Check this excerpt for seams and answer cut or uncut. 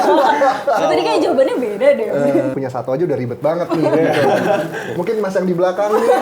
cut